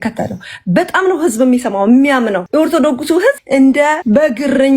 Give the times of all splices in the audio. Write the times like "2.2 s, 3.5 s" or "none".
2.4 s, 3.4 s, 4.0 s

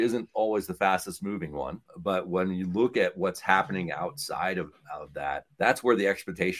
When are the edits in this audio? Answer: 5.5 s

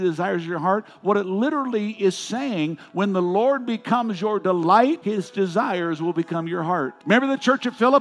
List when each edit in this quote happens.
5.0 s, 7.0 s

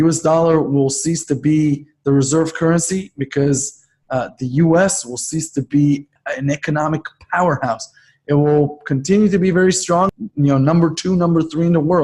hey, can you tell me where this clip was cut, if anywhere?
6.1 s, 10.1 s

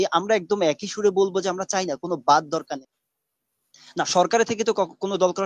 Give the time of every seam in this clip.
2.8 s

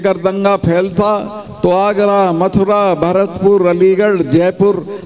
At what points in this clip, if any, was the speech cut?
none

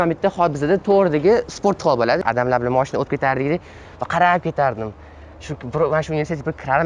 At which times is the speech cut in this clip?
2.2 s

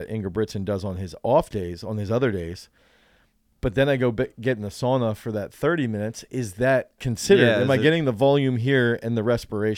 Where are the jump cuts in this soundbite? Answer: 7.1 s

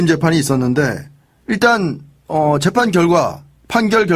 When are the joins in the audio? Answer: 1.8 s

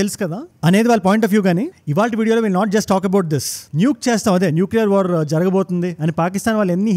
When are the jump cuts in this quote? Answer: 1.8 s

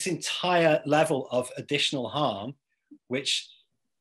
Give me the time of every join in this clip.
none

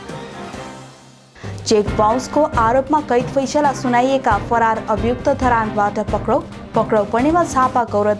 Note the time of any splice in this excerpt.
1.1 s

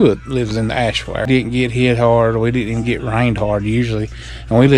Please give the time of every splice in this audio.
1.3 s

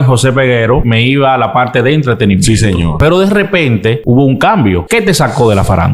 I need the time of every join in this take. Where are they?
0.9 s, 2.9 s, 4.0 s, 4.9 s

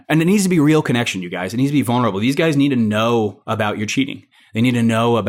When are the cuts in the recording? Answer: none

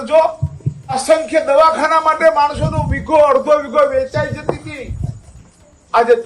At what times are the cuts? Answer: 1.0 s

